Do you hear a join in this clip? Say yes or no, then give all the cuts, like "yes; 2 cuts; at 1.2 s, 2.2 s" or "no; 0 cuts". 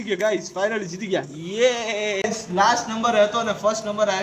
yes; 1 cut; at 2.2 s